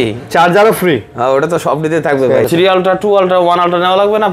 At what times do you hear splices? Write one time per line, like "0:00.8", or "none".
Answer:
0:02.5